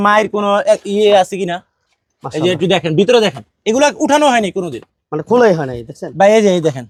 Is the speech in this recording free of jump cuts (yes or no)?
yes